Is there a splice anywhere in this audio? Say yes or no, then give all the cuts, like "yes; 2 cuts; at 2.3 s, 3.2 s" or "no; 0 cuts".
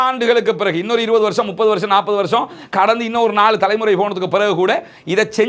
no; 0 cuts